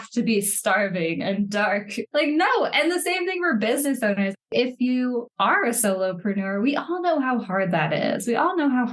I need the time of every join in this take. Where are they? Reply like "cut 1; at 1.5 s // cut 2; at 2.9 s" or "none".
cut 1; at 2.0 s // cut 2; at 4.5 s